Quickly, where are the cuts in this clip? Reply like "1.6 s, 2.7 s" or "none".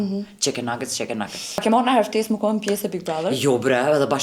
1.5 s